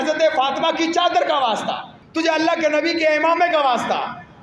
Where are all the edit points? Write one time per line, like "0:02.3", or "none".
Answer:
0:01.9